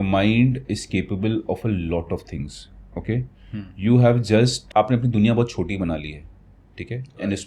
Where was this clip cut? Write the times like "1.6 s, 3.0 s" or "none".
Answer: 4.6 s